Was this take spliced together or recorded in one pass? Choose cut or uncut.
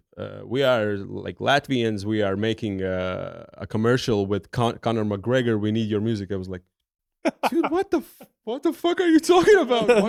uncut